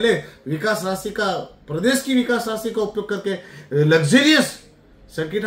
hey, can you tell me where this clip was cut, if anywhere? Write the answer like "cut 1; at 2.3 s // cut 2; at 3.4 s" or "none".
none

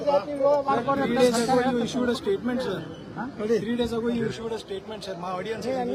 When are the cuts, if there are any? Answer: none

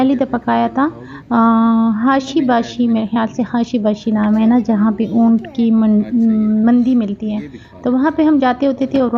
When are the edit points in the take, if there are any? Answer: none

